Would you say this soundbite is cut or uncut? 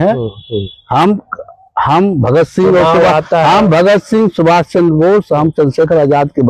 uncut